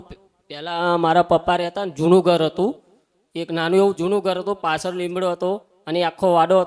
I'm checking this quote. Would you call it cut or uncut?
uncut